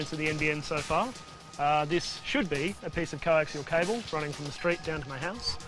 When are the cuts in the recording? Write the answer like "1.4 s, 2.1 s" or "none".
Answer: none